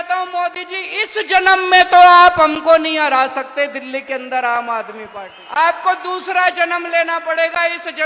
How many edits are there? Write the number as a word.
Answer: one